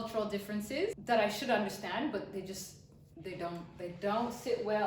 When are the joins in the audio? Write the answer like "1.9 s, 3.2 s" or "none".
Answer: 1.0 s